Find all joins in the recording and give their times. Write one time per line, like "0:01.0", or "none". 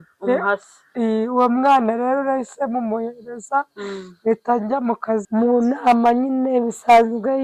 0:05.3